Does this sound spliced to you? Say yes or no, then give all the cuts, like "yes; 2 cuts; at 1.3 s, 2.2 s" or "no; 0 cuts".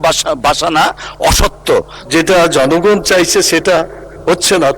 yes; 1 cut; at 2.0 s